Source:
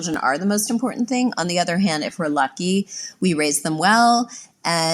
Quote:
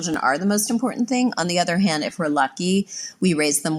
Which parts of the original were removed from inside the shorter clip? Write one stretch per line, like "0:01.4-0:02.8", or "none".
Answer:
none